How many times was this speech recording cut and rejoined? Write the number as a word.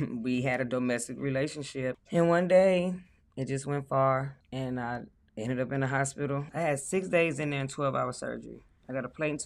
three